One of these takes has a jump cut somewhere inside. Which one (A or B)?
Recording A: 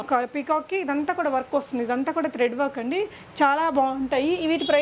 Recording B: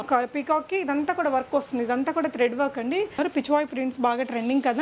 B